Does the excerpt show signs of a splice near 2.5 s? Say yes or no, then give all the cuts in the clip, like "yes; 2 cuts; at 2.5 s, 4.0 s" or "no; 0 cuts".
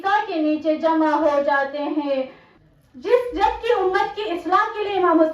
yes; 1 cut; at 2.5 s